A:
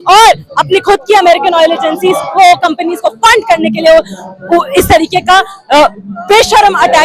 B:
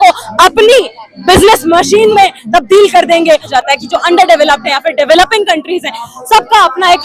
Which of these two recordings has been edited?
B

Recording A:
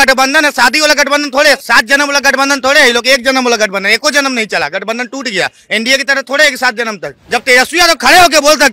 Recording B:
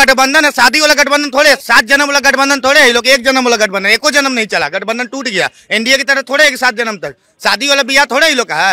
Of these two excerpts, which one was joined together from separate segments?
A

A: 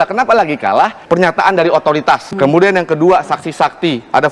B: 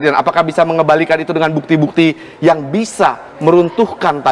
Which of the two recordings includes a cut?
A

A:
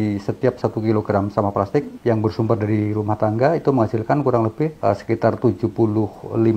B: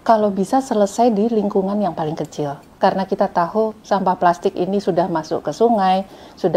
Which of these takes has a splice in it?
A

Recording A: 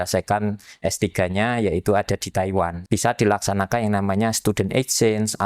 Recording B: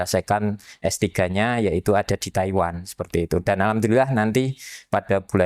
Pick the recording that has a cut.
A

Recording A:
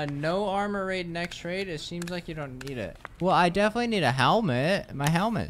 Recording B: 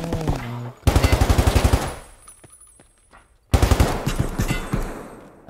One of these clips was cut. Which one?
A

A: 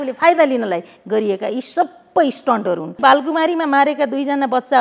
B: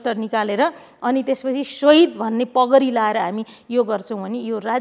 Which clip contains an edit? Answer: A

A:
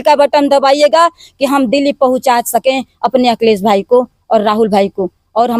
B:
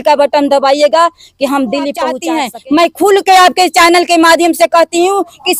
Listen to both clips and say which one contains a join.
B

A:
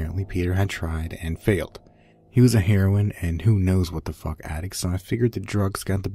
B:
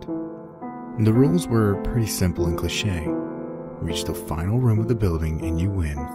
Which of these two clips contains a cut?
B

